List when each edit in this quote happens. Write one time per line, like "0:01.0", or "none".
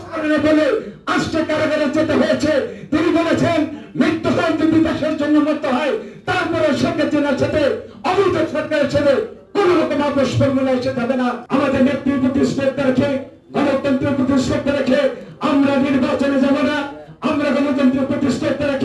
0:11.4